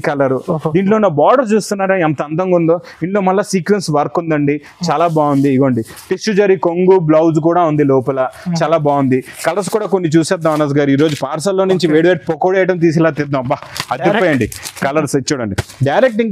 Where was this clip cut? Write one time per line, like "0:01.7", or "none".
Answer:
none